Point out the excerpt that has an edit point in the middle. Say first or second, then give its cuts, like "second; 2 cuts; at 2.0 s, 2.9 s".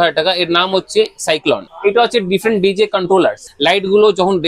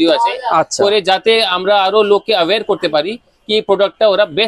first; 2 cuts; at 1.7 s, 3.5 s